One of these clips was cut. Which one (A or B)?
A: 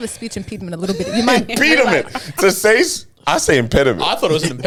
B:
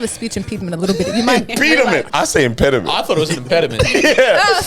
B